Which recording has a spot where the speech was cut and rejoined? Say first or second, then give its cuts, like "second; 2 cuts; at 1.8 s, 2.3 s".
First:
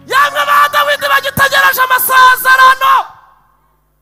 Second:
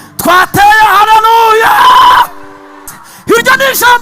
second; 1 cut; at 3.0 s